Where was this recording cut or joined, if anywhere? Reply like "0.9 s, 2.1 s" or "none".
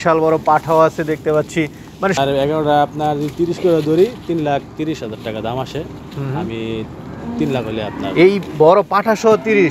2.2 s